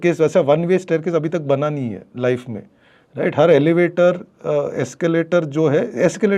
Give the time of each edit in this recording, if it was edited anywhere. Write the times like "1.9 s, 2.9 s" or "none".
none